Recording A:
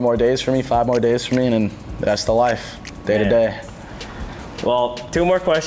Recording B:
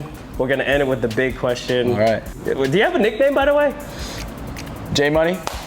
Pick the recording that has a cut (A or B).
B